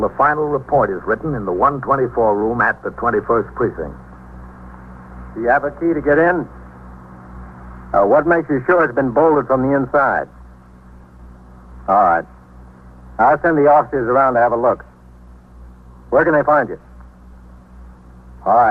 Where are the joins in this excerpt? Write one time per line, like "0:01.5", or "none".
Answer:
0:08.8